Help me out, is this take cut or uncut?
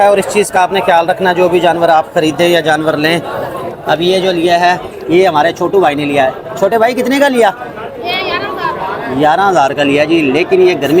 uncut